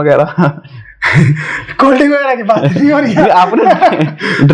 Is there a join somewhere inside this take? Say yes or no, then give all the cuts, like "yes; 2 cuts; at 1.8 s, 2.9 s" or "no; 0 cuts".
no; 0 cuts